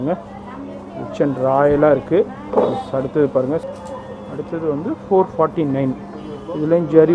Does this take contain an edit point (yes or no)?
yes